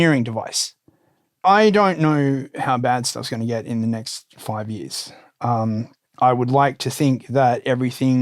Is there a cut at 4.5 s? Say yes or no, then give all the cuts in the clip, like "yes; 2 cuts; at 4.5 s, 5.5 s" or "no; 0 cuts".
no; 1 cut; at 1.4 s